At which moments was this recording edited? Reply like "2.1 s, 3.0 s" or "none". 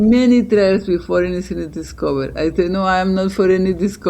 none